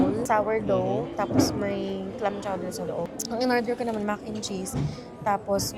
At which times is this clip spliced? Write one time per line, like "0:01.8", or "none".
none